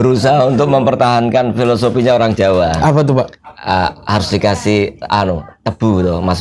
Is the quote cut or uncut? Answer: uncut